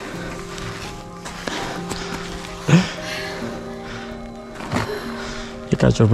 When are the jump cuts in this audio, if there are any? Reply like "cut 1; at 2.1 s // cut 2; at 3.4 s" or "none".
none